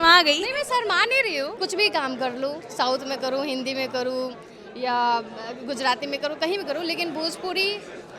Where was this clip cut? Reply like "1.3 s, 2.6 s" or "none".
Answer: 1.5 s